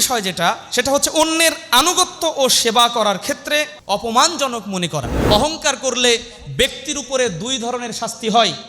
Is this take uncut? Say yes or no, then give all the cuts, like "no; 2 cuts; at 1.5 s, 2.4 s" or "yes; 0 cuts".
no; 2 cuts; at 3.8 s, 5.1 s